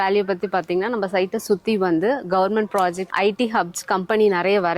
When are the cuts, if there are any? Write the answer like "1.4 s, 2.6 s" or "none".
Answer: 3.0 s